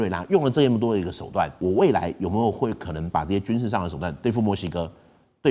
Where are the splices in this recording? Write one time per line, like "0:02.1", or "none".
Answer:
0:01.5